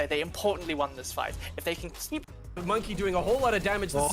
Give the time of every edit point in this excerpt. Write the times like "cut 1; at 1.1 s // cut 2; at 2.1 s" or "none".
cut 1; at 2.4 s